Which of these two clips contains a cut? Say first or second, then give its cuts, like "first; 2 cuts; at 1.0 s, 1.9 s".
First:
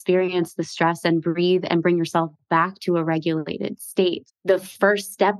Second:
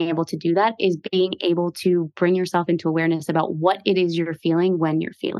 first; 1 cut; at 4.3 s